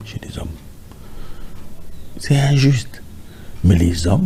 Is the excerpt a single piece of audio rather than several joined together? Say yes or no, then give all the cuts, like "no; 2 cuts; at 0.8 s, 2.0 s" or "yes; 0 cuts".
yes; 0 cuts